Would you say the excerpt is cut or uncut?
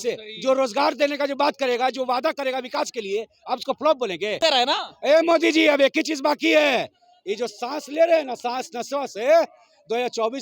cut